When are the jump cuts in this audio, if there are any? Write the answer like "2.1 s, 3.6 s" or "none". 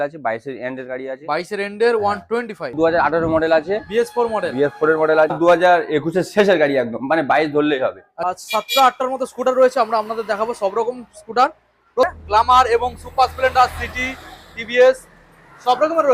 2.8 s, 5.4 s, 8.1 s, 12.1 s